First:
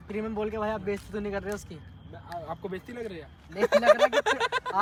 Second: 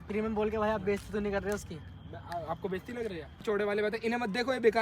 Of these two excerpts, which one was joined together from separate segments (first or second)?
second